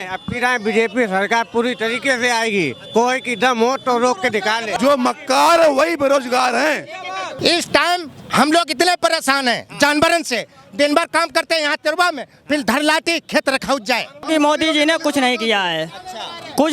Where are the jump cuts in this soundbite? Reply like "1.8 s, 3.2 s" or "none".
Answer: 4.7 s, 7.4 s, 14.3 s